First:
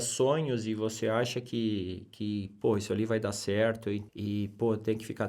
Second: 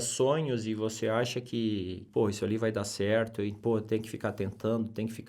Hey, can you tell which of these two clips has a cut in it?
second; 2 cuts; at 2.0 s, 3.5 s

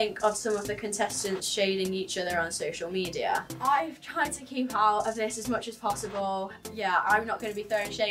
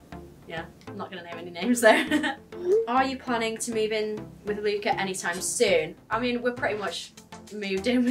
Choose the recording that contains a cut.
second; 2 cuts; at 2.4 s, 6.0 s

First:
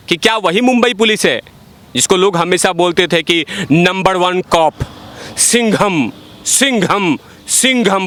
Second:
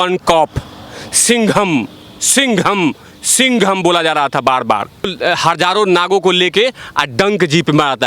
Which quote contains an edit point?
second; 1 cut; at 5.1 s

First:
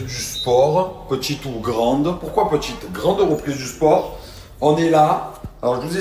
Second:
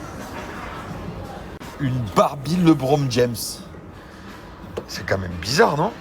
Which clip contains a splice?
second; 1 cut; at 1.7 s

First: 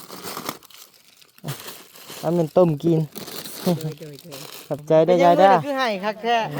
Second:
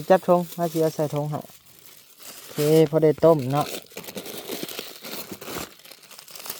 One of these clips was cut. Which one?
first; 1 cut; at 5.6 s

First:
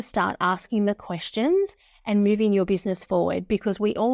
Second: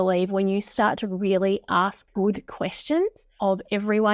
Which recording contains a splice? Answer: second; 2 cuts; at 2.0 s, 3.2 s

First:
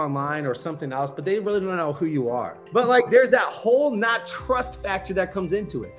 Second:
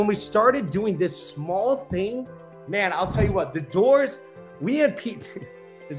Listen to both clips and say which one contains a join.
first; 1 cut; at 2.5 s

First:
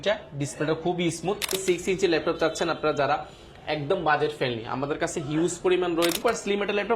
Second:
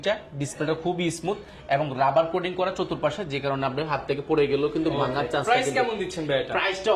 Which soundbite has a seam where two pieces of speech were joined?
first; 2 cuts; at 1.6 s, 6.2 s

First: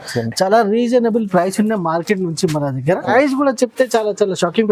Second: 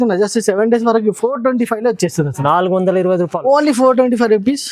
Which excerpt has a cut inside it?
first; 1 cut; at 3.1 s

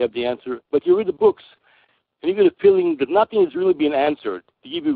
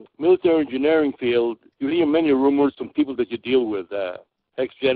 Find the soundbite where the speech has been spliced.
first; 1 cut; at 2.8 s

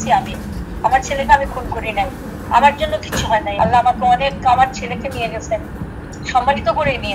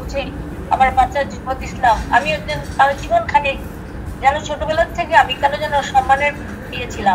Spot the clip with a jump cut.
first; 1 cut; at 3.5 s

